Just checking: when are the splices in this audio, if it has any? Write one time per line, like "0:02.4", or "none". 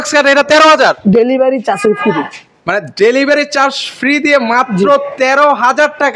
none